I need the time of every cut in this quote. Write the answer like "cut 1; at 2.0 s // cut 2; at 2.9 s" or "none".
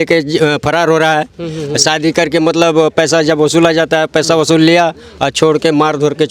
none